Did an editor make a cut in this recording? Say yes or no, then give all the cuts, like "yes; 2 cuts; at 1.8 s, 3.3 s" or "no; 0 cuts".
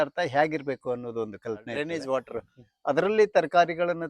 yes; 1 cut; at 1.7 s